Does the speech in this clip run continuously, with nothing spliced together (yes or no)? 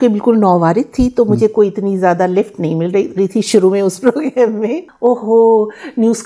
no